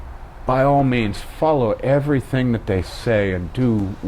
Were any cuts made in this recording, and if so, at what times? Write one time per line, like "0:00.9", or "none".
none